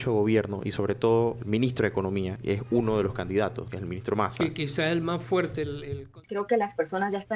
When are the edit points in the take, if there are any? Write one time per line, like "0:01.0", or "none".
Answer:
0:01.4
0:02.4
0:03.7
0:06.1